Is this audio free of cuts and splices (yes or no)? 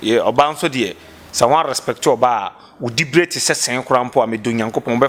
yes